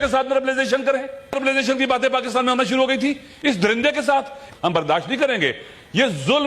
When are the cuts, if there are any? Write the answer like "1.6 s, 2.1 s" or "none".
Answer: 1.4 s, 4.4 s